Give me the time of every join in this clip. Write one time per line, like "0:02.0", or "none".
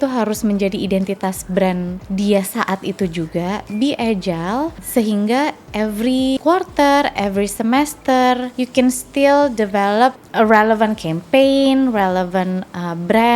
0:02.0
0:04.8
0:06.4
0:08.5
0:10.2